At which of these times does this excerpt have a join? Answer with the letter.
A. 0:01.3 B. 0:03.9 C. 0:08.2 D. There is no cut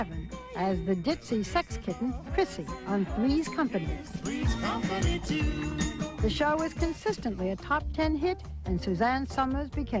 C